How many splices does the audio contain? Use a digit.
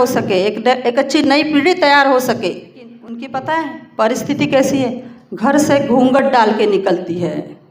1